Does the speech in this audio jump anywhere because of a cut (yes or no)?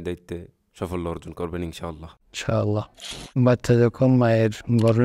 yes